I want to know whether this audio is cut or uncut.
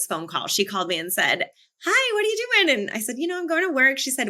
uncut